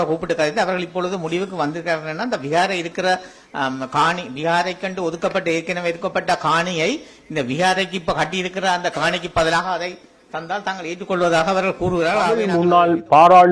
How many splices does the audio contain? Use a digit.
1